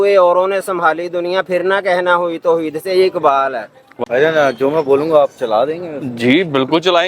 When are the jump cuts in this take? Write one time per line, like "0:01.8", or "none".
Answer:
0:03.8

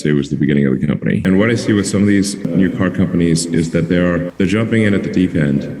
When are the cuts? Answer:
0:01.2
0:02.5
0:04.3

